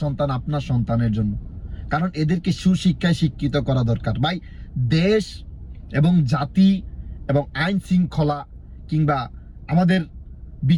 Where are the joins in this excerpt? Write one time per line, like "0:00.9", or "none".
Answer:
none